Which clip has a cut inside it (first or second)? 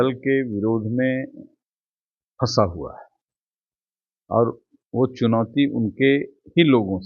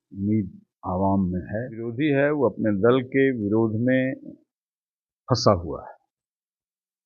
second